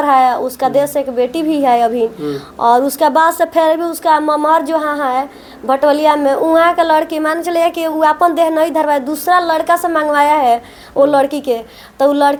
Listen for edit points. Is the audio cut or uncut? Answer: uncut